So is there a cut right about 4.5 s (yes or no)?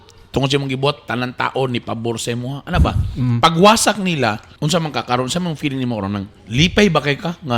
yes